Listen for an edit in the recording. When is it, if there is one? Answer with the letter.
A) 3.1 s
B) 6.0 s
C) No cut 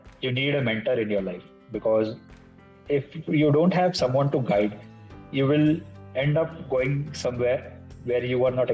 B